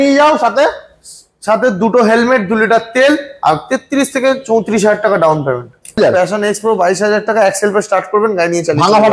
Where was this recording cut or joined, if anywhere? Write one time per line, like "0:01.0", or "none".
0:06.0